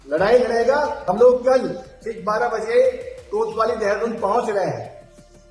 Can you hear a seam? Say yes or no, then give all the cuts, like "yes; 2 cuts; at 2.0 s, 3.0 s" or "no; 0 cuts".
yes; 1 cut; at 1.0 s